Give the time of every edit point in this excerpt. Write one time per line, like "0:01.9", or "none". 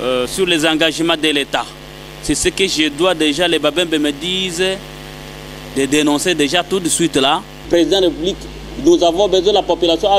0:07.6